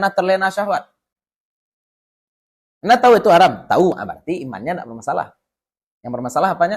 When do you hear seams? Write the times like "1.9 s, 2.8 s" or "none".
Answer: none